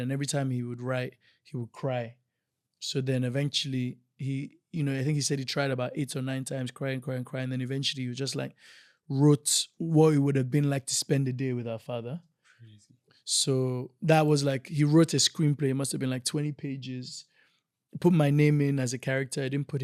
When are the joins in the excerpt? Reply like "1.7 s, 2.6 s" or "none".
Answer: none